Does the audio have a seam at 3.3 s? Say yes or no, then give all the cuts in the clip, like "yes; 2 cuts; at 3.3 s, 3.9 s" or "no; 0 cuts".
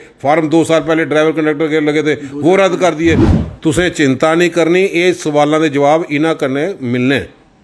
yes; 1 cut; at 3.3 s